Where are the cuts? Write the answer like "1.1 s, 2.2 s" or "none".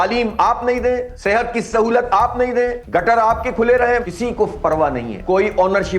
1.1 s, 2.8 s, 4.1 s, 5.1 s